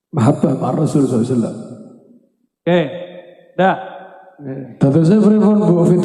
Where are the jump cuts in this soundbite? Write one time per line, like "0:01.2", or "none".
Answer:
0:04.6